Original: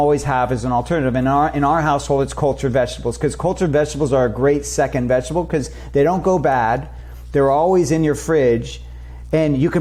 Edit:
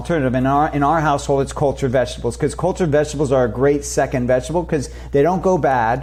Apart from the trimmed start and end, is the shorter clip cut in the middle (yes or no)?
no